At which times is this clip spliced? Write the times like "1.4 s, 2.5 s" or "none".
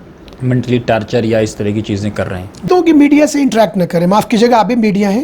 2.7 s

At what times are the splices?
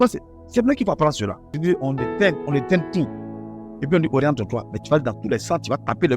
1.6 s

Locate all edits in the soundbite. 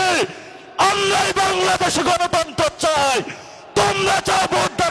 none

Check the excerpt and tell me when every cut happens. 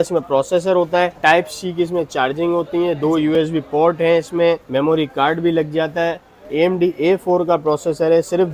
none

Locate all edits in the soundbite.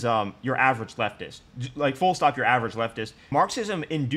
3.2 s

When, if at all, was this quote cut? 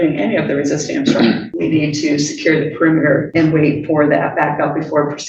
1.5 s, 3.3 s

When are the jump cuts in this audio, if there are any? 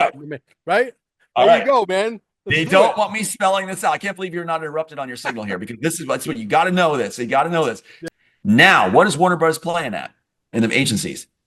8.0 s

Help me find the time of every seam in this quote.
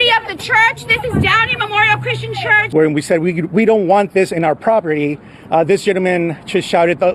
2.6 s

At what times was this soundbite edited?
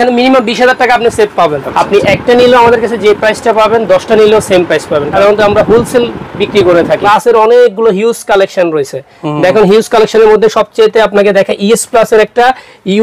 1.6 s, 5.1 s, 7.0 s

